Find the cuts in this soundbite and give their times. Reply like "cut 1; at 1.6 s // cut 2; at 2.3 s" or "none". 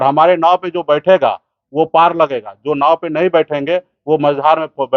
none